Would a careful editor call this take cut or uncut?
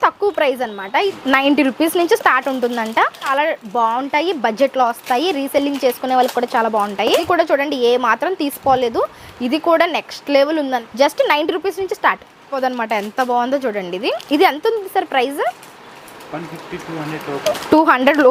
cut